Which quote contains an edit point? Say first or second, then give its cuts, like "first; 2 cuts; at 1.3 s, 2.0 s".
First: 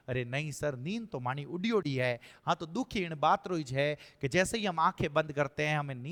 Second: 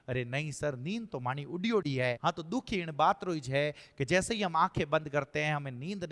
second; 1 cut; at 2.2 s